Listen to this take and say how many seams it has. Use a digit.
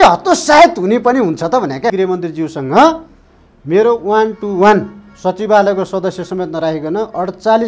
1